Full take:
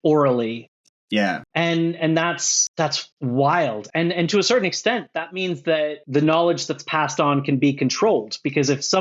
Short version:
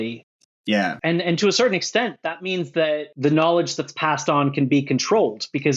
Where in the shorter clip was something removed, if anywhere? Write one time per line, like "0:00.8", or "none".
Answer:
0:01.0

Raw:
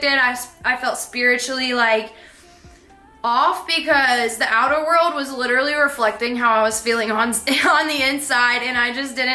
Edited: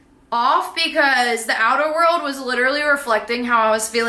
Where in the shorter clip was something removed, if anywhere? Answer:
none

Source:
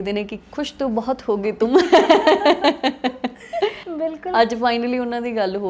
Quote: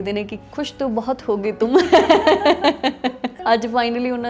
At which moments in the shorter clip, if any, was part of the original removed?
0:03.4

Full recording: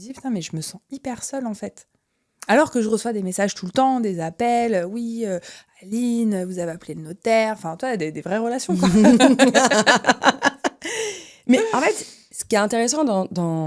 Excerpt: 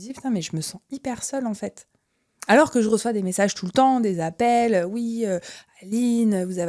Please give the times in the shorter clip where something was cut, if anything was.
none

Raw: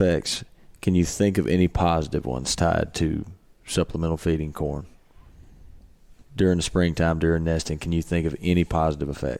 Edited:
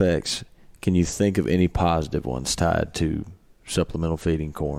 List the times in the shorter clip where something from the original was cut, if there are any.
none

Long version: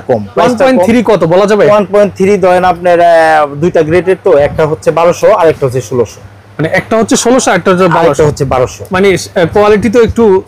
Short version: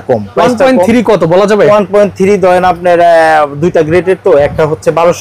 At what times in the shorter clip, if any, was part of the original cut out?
none

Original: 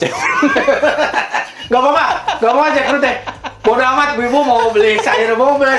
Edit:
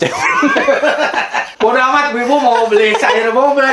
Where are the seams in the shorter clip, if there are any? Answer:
0:01.4

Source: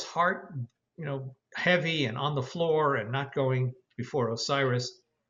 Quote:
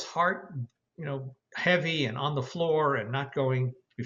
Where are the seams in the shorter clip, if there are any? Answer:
none

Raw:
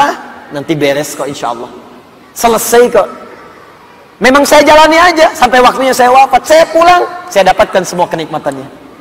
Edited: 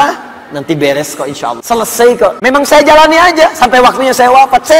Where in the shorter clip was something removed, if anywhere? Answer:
0:01.6
0:02.4

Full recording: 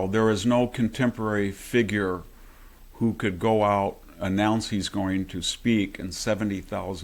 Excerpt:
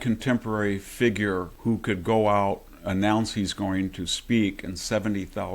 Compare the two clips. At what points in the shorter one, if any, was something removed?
0:01.5

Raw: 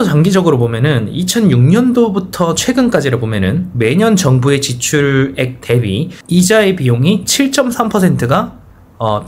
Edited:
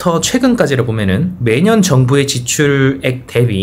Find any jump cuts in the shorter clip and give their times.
none

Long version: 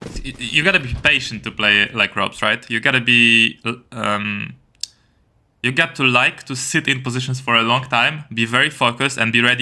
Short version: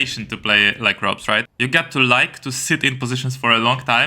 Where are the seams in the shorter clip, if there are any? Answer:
0:01.5

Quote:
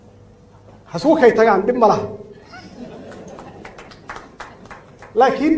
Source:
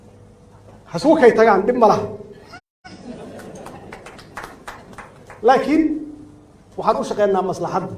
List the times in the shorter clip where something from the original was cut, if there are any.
0:02.5

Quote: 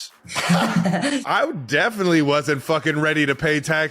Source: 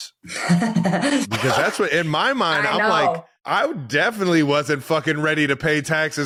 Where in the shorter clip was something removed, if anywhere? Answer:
0:01.2

